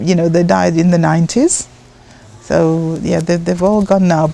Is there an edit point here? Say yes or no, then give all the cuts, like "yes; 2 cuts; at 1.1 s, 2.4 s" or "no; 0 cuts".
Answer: no; 0 cuts